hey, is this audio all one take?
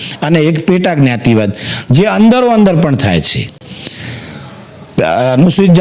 yes; 0 cuts

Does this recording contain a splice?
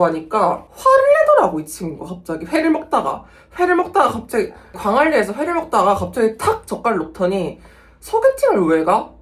no; 0 cuts

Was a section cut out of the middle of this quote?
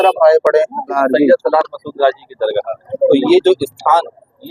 yes; 2 cuts; at 1.0 s, 2.8 s

